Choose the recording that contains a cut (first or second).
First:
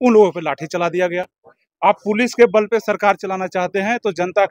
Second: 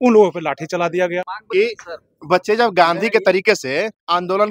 second